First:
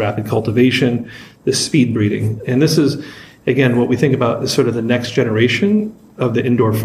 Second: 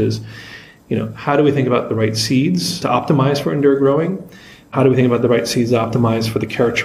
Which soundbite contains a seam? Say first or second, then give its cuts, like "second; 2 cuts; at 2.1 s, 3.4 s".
second; 1 cut; at 2.7 s